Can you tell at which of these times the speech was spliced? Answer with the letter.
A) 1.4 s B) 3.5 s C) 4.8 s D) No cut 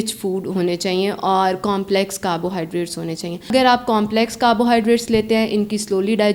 B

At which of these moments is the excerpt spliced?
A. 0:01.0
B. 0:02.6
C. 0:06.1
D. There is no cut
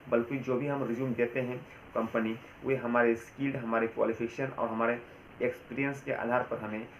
D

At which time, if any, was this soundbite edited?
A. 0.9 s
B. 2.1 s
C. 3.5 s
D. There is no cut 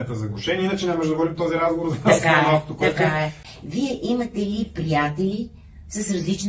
C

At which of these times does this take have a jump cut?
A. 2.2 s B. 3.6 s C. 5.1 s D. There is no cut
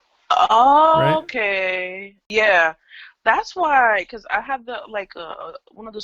A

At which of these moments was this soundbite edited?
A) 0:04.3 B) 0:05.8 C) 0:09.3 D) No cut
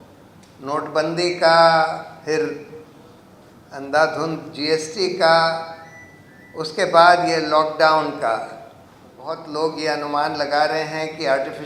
C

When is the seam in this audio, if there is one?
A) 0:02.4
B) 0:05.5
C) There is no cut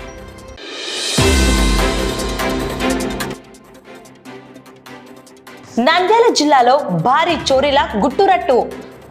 B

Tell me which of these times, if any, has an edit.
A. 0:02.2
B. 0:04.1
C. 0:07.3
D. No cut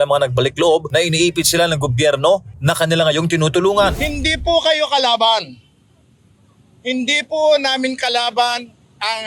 B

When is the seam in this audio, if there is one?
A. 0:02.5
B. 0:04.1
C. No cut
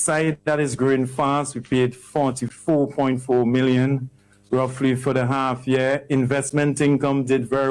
A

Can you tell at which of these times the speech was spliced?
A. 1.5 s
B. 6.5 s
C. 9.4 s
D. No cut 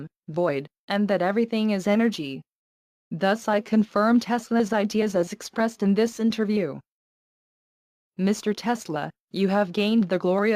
C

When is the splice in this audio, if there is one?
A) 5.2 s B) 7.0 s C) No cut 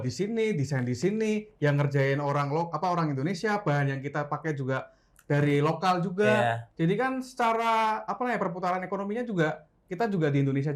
C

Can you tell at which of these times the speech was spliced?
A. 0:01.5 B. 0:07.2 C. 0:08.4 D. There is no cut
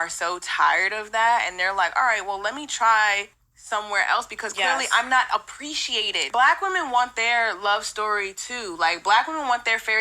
C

